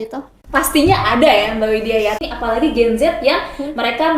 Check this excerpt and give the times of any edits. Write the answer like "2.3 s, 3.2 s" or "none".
2.2 s